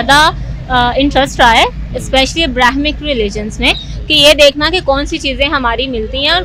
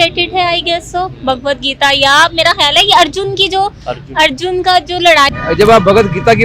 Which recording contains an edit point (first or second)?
second